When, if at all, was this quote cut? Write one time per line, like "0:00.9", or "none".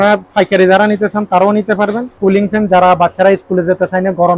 0:02.1